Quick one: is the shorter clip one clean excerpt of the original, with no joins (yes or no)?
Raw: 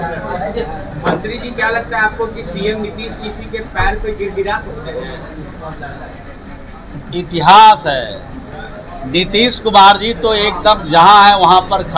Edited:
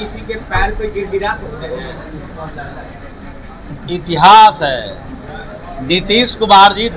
yes